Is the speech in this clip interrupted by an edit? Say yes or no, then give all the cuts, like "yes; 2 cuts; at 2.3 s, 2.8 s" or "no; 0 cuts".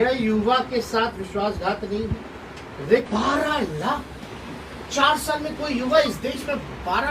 yes; 1 cut; at 3.1 s